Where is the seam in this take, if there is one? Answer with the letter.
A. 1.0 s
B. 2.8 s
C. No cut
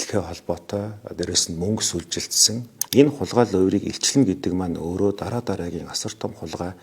B